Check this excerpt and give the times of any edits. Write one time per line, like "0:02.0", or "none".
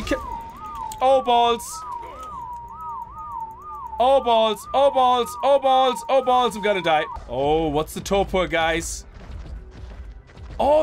0:07.2